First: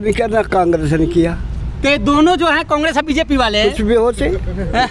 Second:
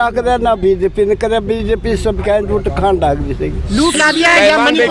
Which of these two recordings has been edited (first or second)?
second